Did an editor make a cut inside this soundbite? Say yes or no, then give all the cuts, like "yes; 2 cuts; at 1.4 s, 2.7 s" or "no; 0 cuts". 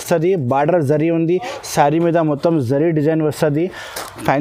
no; 0 cuts